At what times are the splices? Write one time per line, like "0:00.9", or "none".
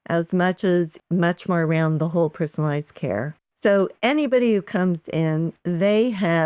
0:01.0
0:03.4